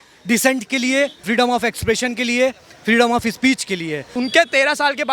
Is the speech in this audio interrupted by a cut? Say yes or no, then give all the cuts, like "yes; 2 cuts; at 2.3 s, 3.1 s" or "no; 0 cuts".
yes; 1 cut; at 4.0 s